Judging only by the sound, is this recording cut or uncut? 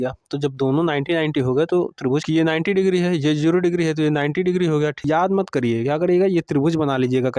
cut